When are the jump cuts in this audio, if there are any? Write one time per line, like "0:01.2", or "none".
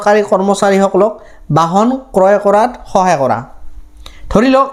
none